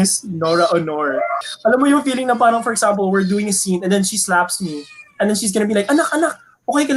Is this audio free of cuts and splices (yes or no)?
no